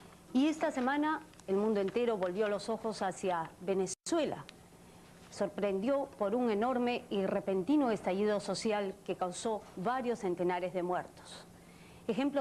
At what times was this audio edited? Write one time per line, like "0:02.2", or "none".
0:07.4